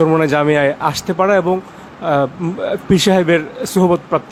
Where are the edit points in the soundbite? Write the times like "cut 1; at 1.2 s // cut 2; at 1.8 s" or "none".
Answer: none